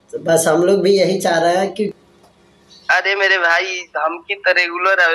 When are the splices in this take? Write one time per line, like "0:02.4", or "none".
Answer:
0:01.9